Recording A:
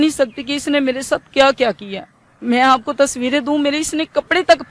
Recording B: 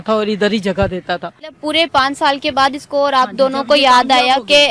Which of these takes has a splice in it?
B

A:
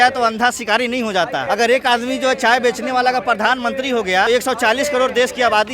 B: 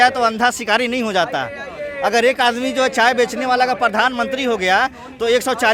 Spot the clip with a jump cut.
A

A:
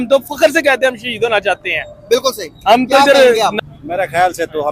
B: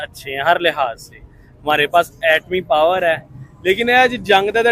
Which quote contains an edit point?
A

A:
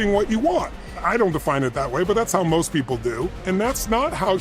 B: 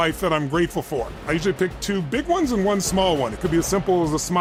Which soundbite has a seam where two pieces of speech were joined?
A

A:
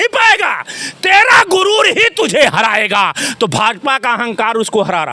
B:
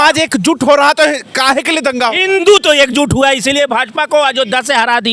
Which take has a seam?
B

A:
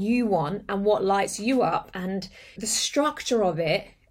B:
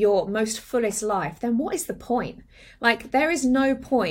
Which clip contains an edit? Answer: A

